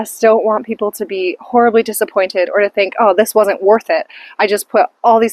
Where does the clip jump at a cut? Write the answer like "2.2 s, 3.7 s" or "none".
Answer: none